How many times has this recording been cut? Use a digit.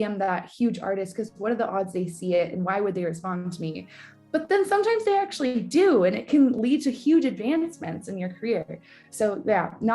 0